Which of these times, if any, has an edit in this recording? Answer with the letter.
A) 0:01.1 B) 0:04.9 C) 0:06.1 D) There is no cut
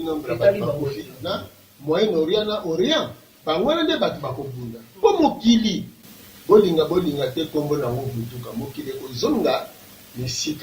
A